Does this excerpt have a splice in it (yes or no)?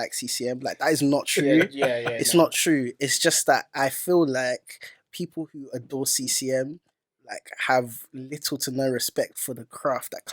no